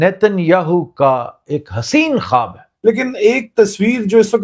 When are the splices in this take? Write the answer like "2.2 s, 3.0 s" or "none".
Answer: 2.6 s